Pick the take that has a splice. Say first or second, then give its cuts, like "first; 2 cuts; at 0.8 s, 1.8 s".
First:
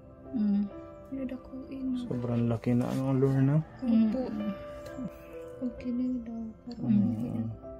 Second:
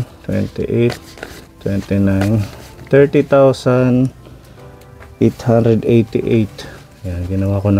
first; 1 cut; at 5.1 s